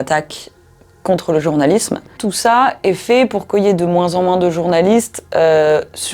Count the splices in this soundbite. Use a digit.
1